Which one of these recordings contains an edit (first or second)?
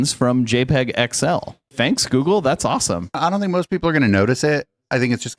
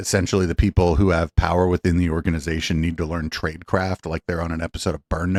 first